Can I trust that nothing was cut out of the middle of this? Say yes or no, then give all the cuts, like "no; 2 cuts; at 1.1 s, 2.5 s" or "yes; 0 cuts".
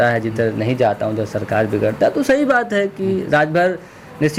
yes; 0 cuts